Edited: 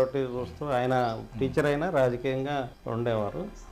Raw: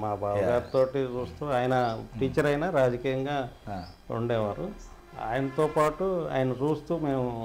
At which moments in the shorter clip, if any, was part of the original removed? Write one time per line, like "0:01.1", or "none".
0:02.8